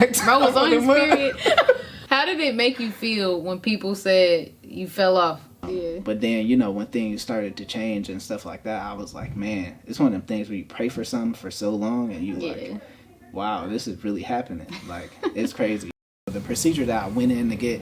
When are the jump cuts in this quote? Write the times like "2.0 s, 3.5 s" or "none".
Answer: 1.9 s, 5.6 s, 15.9 s